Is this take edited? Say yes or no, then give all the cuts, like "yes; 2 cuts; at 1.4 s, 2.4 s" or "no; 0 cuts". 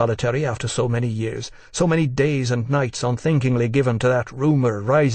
yes; 1 cut; at 1.6 s